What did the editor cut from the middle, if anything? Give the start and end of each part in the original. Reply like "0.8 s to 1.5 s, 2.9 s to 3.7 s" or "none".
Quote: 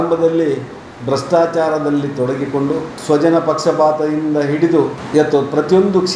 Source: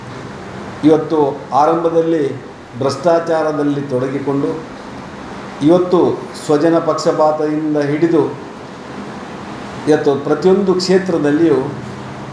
4.7 s to 6.3 s, 8.4 s to 9.7 s